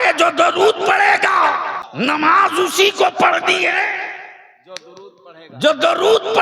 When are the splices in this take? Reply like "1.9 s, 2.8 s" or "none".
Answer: 1.8 s